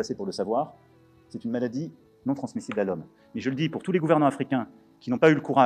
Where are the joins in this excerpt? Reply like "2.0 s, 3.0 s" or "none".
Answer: none